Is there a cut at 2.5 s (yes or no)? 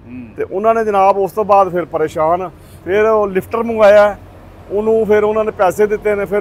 no